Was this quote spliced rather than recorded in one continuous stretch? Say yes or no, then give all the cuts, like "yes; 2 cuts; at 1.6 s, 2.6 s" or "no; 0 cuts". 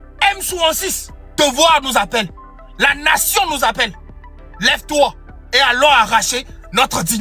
yes; 1 cut; at 1.3 s